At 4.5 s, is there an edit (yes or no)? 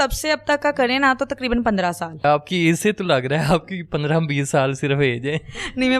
no